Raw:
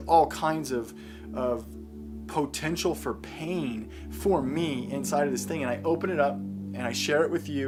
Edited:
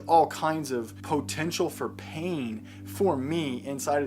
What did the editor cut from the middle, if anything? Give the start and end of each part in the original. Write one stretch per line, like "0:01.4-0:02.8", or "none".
0:01.0-0:02.2